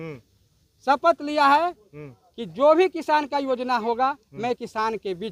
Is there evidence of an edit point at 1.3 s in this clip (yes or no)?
no